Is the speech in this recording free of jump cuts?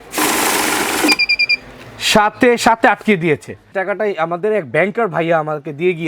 no; 1 cut; at 3.6 s

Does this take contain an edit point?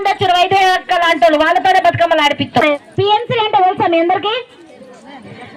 yes; 1 cut; at 2.8 s

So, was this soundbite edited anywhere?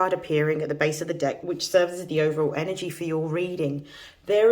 yes; 1 cut; at 1.4 s

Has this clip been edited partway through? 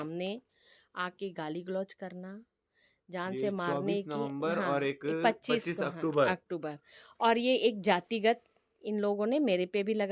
no; 0 cuts

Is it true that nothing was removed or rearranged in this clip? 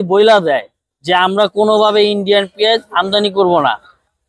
yes; 0 cuts

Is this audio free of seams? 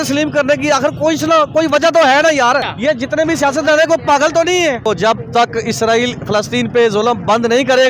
no; 2 cuts; at 2.7 s, 4.8 s

